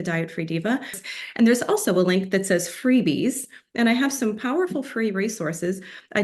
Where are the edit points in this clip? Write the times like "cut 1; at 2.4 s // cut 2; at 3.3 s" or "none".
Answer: cut 1; at 1.0 s